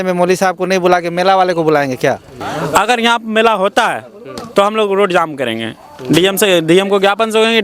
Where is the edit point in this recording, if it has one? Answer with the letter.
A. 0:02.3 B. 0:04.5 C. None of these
A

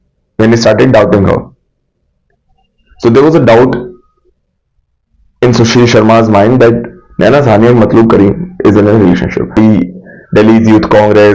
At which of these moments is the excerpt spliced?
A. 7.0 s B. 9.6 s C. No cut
B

